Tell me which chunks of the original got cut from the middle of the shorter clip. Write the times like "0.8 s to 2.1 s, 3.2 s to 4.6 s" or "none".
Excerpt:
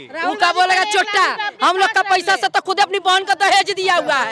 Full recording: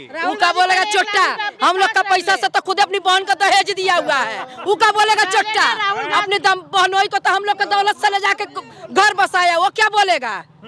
none